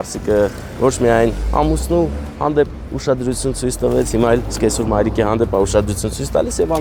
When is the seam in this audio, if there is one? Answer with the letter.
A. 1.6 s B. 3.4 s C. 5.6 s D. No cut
D